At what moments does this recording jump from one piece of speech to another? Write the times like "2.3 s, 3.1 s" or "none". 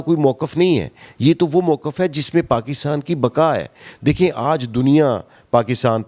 none